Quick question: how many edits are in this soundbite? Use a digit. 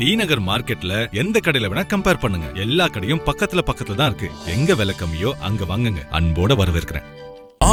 0